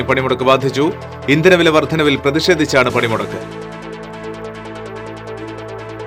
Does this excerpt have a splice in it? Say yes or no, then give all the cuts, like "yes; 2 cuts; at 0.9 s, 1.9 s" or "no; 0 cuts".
no; 0 cuts